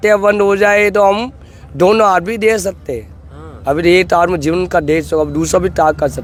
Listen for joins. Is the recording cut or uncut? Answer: uncut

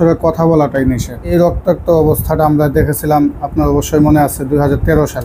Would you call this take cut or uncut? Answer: cut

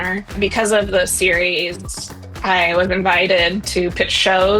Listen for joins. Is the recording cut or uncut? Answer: uncut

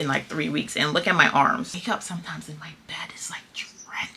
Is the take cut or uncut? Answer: cut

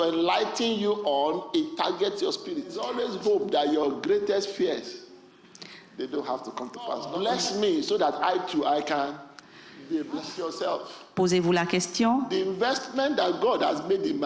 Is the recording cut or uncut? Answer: cut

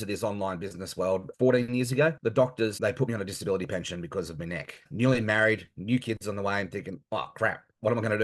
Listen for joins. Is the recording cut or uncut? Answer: cut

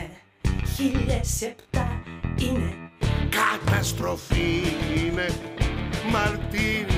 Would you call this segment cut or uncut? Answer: cut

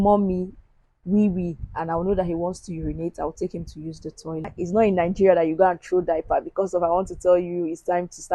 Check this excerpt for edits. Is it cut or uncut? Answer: cut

